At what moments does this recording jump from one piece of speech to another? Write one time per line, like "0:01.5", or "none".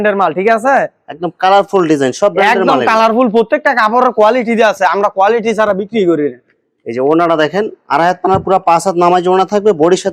none